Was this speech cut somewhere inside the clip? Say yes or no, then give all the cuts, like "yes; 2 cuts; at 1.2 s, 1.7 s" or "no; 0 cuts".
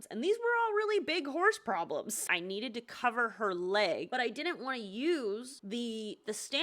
yes; 3 cuts; at 2.2 s, 4.1 s, 5.5 s